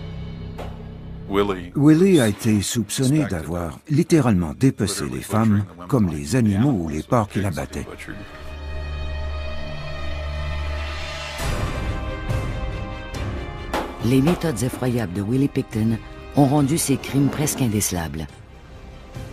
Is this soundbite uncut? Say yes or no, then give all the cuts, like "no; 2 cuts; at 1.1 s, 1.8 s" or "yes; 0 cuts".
no; 1 cut; at 5.4 s